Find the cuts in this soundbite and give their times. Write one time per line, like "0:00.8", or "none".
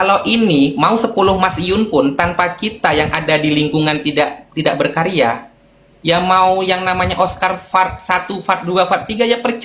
none